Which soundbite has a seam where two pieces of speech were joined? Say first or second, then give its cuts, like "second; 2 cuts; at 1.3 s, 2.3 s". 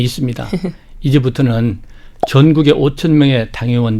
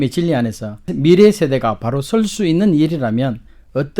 second; 1 cut; at 0.9 s